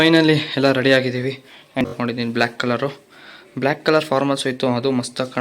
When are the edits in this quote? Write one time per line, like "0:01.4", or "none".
0:01.8